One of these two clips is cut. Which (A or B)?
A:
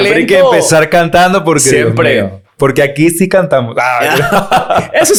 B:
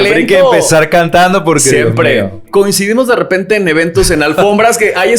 B